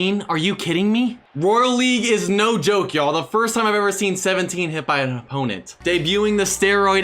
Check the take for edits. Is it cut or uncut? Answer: cut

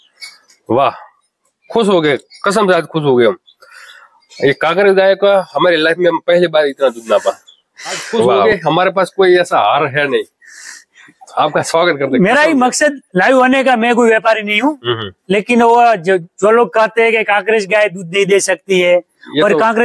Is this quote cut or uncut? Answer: cut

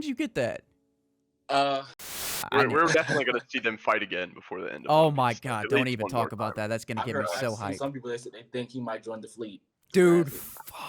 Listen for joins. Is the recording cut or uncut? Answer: cut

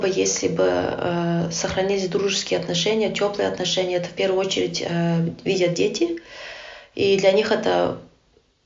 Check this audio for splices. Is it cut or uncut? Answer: uncut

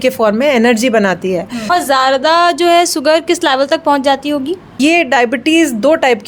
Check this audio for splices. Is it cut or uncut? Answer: cut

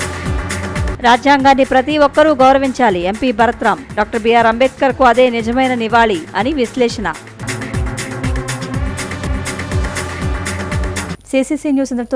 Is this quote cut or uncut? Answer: uncut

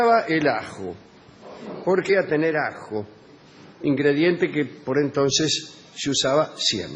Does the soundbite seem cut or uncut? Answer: uncut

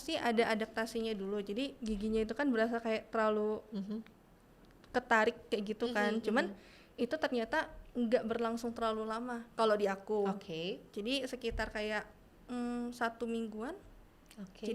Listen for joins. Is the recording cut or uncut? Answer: uncut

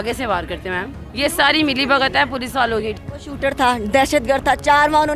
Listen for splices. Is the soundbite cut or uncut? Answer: cut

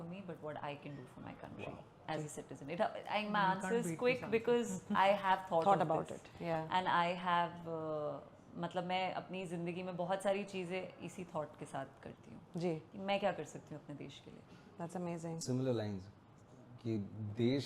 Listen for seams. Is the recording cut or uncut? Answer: uncut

